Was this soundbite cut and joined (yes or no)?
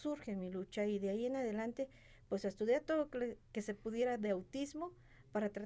no